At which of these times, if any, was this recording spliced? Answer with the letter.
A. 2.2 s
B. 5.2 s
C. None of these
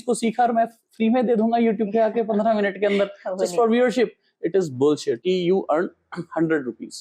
B